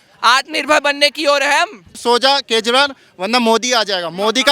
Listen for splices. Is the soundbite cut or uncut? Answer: cut